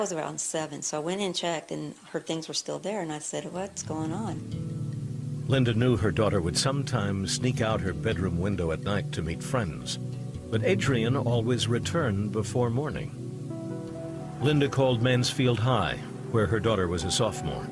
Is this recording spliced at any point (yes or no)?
yes